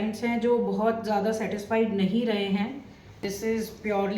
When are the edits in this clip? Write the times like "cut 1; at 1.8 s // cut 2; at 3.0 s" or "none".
cut 1; at 3.2 s